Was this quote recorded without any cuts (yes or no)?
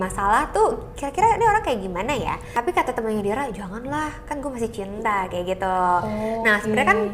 no